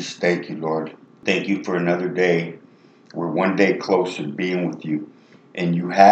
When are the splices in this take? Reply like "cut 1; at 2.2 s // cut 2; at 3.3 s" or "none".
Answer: cut 1; at 1.1 s